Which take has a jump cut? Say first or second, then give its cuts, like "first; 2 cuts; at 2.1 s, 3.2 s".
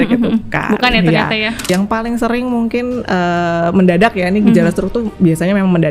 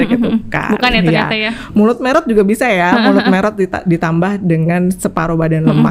first; 1 cut; at 1.7 s